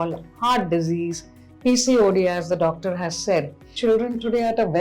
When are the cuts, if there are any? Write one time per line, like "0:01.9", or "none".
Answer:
0:03.7